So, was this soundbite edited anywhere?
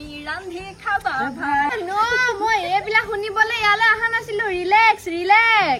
yes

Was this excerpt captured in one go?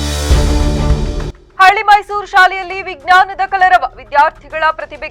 yes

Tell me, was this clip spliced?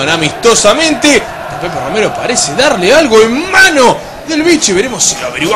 no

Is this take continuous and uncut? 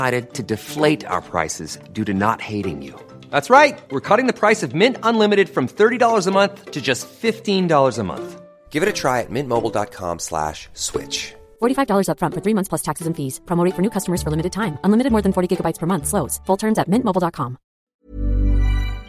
no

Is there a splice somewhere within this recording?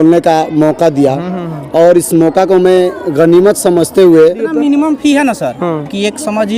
yes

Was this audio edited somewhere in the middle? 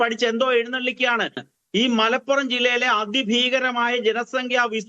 yes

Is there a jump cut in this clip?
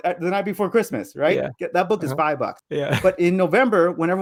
no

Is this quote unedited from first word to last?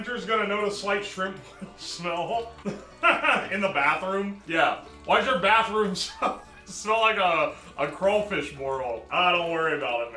no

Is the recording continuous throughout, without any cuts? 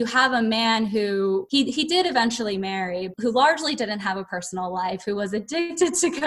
no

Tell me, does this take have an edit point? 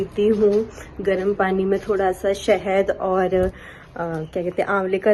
no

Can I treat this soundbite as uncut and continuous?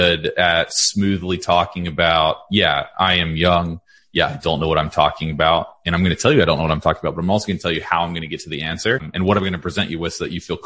no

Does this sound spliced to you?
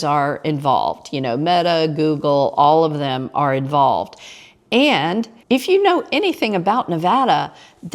yes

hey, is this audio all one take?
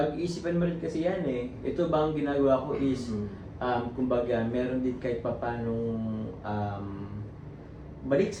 yes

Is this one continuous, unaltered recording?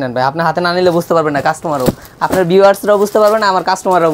yes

